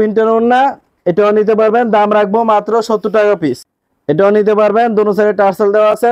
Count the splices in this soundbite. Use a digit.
1